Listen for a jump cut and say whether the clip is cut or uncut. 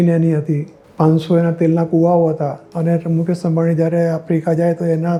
uncut